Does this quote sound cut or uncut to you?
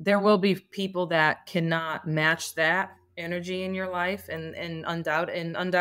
uncut